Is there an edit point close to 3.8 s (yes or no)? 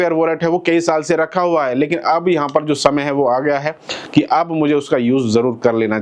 no